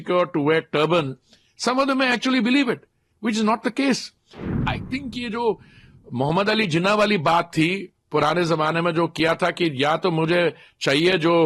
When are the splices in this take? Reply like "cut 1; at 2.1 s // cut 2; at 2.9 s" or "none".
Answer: cut 1; at 4.6 s